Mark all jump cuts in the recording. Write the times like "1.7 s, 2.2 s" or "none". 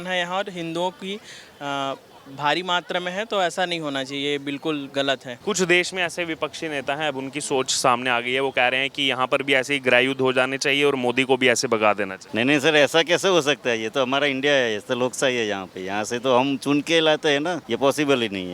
5.3 s, 12.2 s, 17.6 s